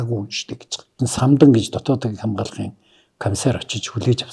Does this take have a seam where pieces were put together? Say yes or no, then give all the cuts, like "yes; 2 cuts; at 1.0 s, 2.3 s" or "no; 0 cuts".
yes; 1 cut; at 1.0 s